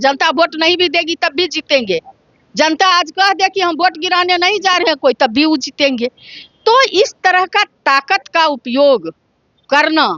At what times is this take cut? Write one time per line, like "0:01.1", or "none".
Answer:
none